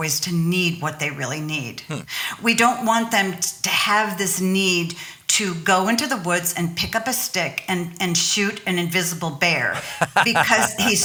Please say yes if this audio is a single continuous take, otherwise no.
yes